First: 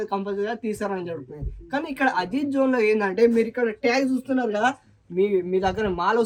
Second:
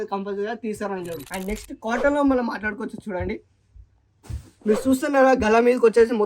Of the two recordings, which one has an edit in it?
second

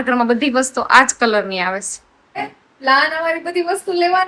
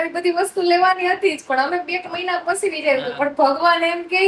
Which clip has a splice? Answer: first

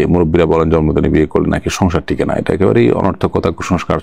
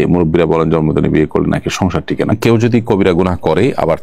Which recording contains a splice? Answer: second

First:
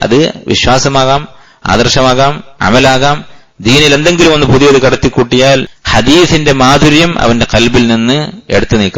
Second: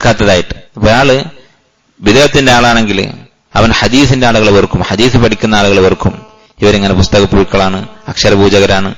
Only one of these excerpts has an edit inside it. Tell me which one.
first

